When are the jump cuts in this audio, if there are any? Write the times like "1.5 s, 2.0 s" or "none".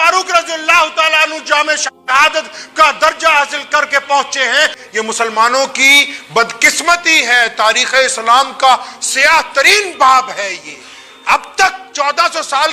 4.8 s